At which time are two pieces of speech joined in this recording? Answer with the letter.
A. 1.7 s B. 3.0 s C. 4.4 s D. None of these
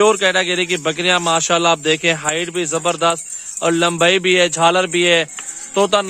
D